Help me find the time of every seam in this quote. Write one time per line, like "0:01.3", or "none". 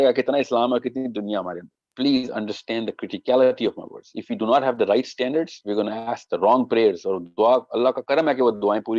0:01.8